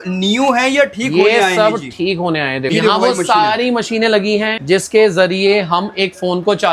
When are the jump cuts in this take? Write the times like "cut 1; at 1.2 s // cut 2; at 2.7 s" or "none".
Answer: cut 1; at 2.8 s // cut 2; at 4.6 s